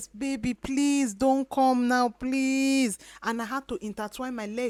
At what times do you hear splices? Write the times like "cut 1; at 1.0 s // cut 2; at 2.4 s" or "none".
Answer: none